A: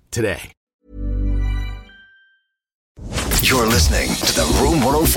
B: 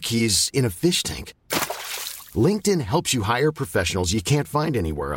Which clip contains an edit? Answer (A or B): A